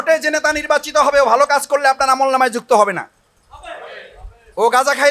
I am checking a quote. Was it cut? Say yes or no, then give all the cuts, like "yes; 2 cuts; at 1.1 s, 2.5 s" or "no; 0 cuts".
no; 0 cuts